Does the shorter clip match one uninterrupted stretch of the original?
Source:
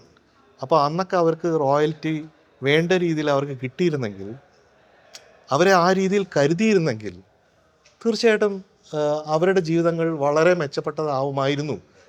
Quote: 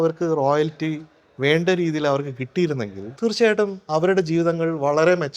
no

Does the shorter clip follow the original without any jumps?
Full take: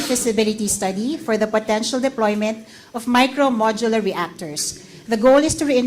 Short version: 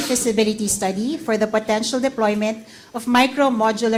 yes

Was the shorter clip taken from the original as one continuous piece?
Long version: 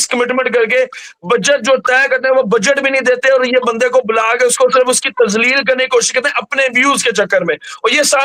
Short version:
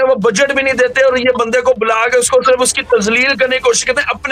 yes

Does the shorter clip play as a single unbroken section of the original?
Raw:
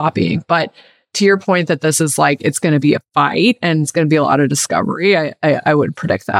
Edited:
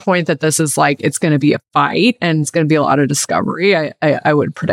yes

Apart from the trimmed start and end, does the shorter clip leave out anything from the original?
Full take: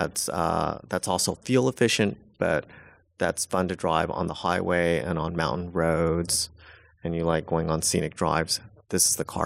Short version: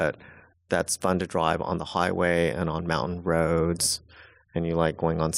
no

